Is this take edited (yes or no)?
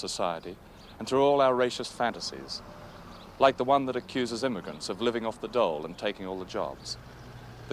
no